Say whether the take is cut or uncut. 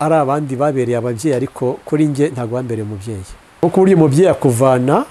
cut